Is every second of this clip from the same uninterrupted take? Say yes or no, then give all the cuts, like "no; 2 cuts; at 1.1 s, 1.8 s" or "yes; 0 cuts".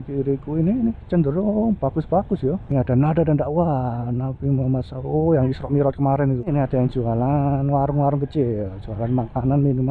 no; 2 cuts; at 2.6 s, 6.5 s